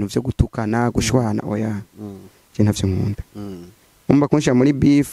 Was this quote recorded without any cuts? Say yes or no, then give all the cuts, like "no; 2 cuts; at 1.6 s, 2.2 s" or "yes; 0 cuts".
yes; 0 cuts